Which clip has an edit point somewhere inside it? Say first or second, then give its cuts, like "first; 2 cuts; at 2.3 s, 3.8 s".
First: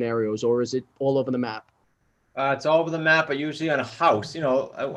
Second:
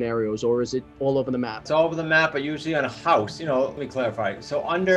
second; 2 cuts; at 1.7 s, 3.8 s